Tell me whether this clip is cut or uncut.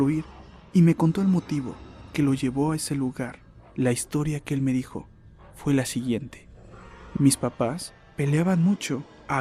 uncut